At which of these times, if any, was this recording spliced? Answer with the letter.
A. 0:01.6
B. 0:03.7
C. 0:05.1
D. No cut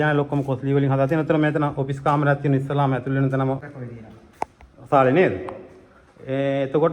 B